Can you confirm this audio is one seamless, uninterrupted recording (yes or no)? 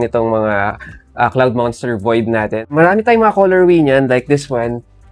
no